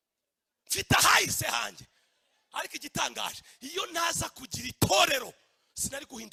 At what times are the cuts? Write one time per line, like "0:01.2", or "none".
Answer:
none